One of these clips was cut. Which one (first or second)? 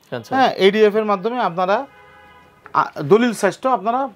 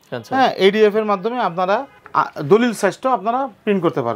second